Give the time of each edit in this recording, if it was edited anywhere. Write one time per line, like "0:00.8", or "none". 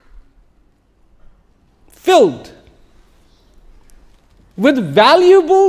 none